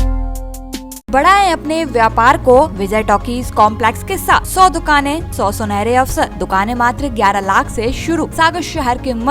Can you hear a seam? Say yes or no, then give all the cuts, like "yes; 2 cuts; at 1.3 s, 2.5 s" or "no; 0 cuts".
yes; 6 cuts; at 1.1 s, 2.8 s, 4.5 s, 5.3 s, 6.4 s, 8.3 s